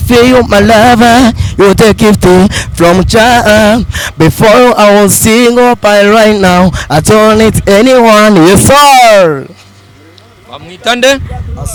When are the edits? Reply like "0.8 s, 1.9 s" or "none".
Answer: none